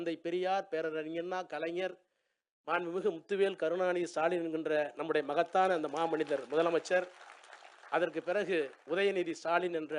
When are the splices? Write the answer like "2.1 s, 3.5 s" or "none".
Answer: none

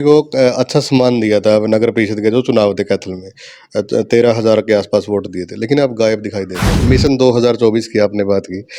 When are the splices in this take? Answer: 6.8 s

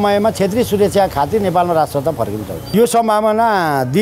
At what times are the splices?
2.7 s

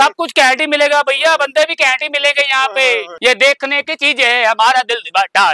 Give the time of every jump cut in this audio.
3.2 s

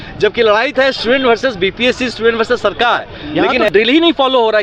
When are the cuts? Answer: 3.7 s

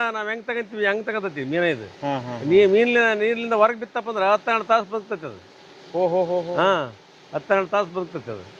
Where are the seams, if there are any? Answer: none

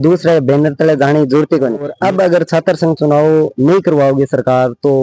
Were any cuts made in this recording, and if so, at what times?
1.9 s

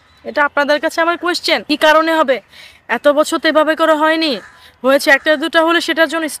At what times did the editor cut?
1.6 s

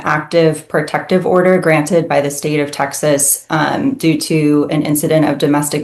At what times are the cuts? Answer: none

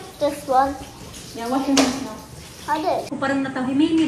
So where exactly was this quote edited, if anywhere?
3.1 s

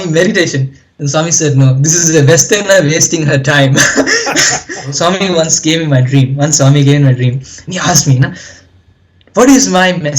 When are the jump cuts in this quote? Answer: 4.9 s

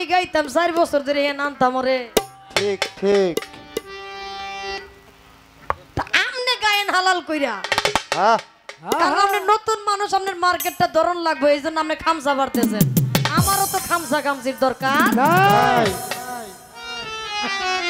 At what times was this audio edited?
none

